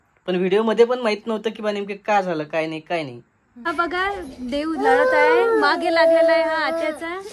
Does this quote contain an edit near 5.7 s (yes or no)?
no